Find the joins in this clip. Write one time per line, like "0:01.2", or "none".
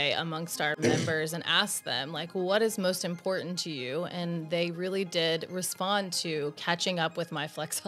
none